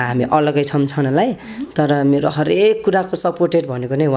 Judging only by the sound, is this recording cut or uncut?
uncut